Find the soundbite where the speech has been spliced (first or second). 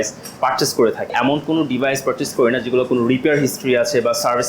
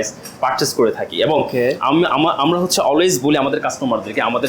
first